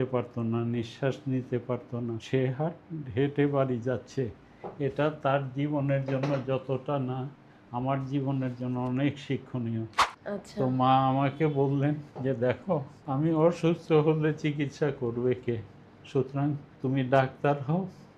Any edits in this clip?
yes; 5 cuts; at 2.2 s, 10.1 s, 12.1 s, 12.9 s, 16.7 s

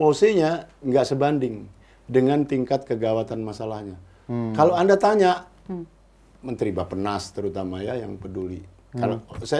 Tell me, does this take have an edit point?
no; 0 cuts

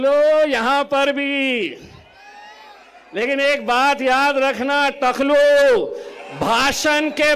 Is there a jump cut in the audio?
no; 0 cuts

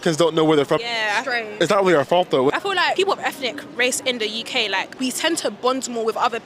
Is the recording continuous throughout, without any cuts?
no; 1 cut; at 2.6 s

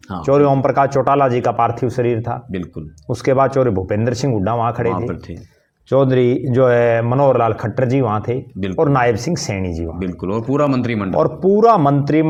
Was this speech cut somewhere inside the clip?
no; 0 cuts

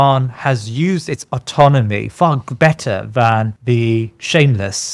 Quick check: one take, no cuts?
no; 1 cut; at 3.5 s

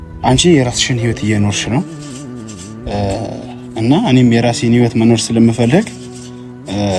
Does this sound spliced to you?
no; 0 cuts

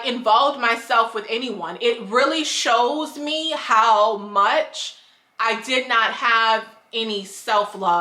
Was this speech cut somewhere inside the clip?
no; 0 cuts

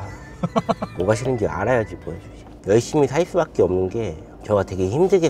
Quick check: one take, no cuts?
no; 2 cuts; at 0.9 s, 2.6 s

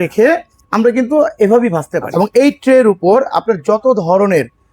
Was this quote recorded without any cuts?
no; 1 cut; at 2.0 s

